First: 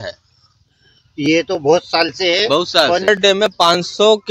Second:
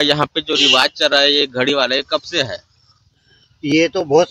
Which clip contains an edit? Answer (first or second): first